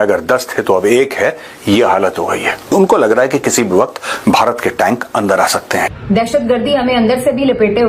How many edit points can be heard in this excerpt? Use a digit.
2